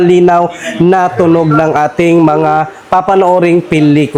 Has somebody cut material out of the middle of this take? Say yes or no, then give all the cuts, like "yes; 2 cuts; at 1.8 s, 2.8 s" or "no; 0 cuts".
no; 0 cuts